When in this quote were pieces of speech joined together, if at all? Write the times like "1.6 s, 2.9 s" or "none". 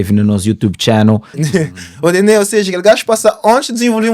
1.3 s